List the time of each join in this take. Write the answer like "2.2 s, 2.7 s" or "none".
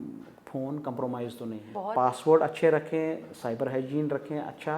1.7 s

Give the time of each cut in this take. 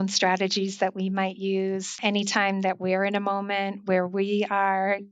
2.0 s

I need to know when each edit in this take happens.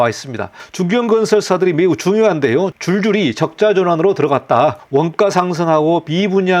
4.8 s

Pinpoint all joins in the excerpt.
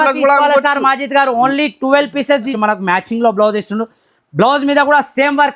2.5 s

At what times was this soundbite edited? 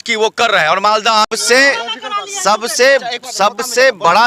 1.3 s

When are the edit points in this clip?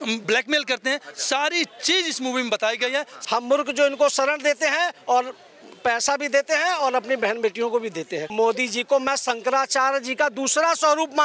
3.1 s, 8.2 s

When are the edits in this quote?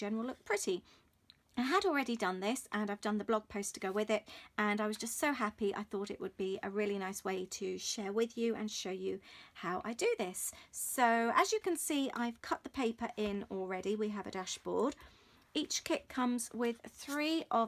11.2 s

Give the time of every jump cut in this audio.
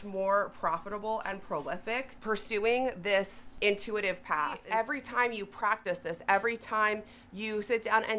2.1 s, 3.4 s, 4.6 s

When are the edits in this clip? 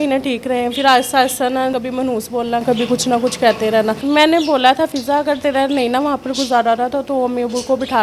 1.8 s, 4.0 s

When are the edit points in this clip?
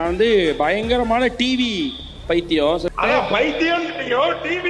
2.9 s

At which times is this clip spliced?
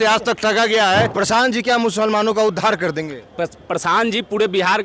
1.1 s

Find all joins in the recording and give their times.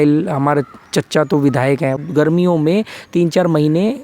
2.0 s

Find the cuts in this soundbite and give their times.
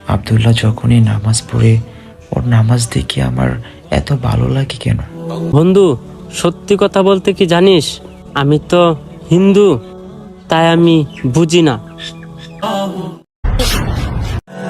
5.5 s, 12.6 s

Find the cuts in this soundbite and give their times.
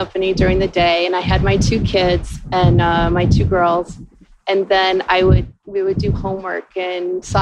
none

